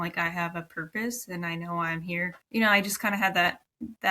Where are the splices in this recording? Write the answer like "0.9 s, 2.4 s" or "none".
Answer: 2.3 s